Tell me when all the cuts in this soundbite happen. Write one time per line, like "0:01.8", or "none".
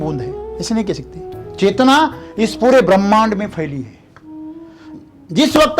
0:01.3